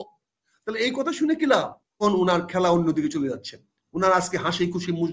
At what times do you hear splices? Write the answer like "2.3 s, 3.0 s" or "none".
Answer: 2.0 s